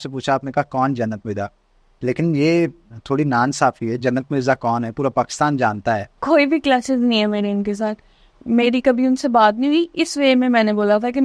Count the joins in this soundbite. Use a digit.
1